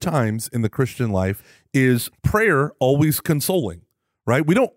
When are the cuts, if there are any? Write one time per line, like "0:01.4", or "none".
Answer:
0:01.5
0:02.1